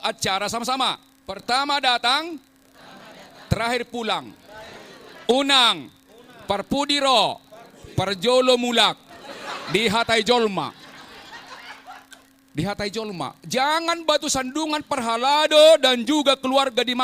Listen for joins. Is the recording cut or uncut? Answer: cut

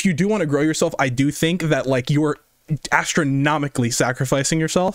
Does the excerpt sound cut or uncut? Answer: uncut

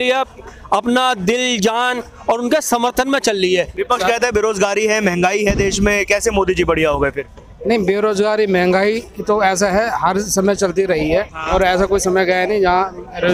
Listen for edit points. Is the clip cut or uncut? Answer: cut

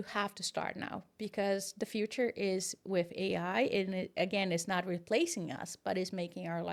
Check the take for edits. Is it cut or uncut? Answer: uncut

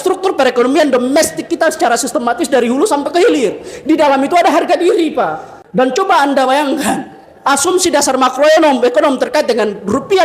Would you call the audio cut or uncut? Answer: cut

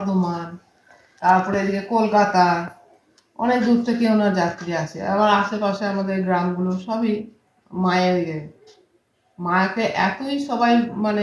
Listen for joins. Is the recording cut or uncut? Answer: uncut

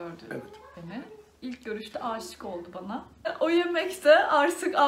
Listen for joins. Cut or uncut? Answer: cut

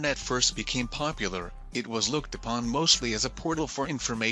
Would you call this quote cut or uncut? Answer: uncut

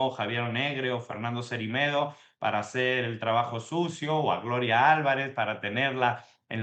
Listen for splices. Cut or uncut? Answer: uncut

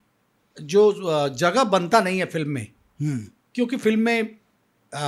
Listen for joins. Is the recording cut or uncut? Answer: uncut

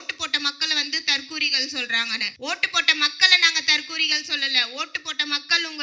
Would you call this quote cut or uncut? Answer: cut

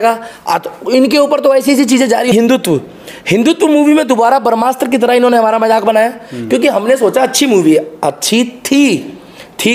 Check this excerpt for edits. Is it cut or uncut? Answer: cut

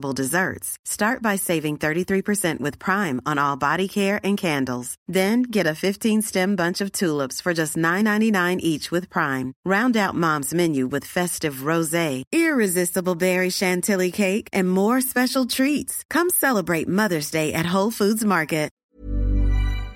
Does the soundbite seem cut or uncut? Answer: cut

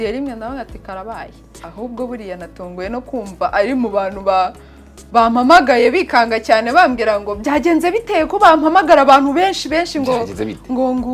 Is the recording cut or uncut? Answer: cut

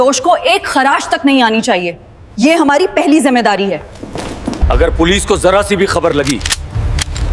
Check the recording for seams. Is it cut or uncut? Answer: cut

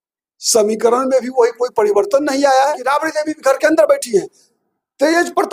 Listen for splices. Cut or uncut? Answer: cut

